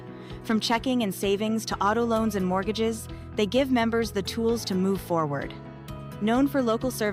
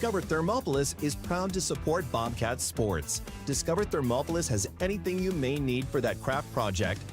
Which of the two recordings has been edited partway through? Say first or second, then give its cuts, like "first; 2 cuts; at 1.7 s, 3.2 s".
second; 1 cut; at 0.9 s